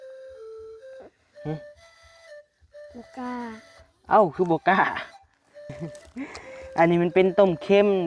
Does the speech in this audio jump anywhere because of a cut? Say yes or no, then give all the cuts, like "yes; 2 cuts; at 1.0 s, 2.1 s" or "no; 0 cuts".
yes; 2 cuts; at 1.2 s, 5.8 s